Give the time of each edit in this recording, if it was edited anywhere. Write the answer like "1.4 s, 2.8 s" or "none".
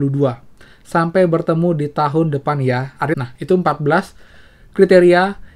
3.2 s